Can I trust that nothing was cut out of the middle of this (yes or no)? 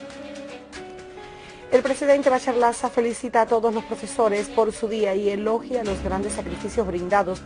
no